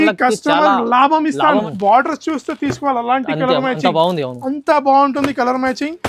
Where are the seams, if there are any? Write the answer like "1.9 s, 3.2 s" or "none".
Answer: 1.5 s